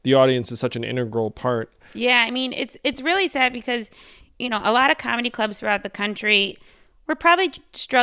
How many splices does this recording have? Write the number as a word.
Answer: one